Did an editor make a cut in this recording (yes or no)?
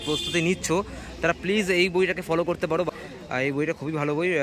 no